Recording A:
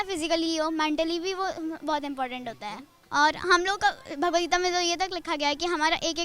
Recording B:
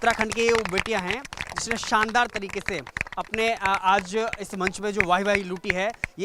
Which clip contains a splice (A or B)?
A